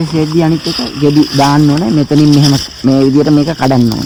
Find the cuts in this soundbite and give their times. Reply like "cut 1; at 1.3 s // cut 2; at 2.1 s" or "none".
none